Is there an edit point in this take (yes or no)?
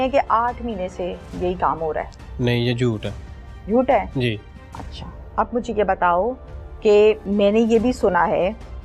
no